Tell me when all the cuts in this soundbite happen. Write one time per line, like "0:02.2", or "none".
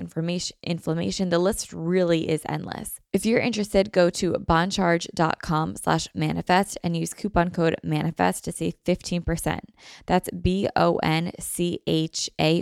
0:02.9

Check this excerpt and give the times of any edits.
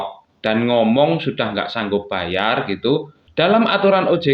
0:03.2

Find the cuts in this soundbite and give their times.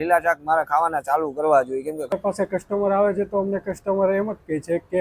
0:02.1

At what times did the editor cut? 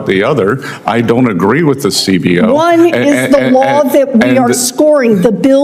none

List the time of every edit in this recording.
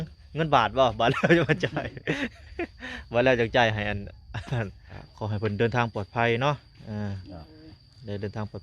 0:05.0

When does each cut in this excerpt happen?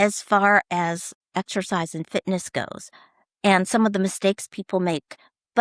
0:01.1

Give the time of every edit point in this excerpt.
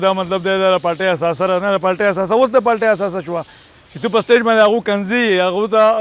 none

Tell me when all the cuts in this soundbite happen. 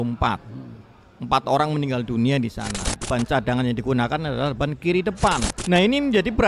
0:02.9
0:05.5

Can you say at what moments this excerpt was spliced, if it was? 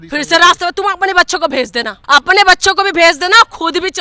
0:01.9

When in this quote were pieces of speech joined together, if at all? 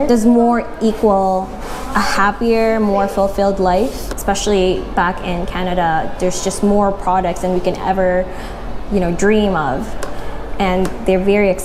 none

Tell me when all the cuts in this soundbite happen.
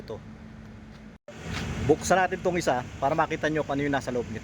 0:01.2

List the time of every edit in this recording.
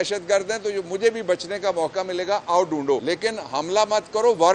0:03.0

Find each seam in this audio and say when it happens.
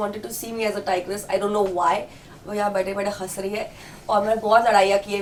none

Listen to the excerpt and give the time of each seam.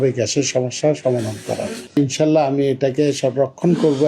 0:01.8

